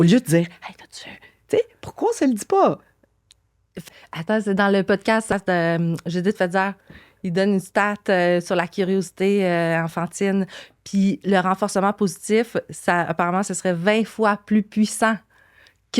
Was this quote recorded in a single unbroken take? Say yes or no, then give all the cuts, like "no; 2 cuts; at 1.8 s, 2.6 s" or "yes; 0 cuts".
yes; 0 cuts